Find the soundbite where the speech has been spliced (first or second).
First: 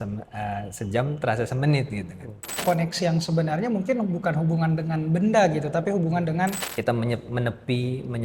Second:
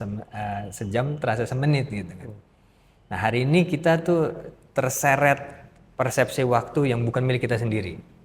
first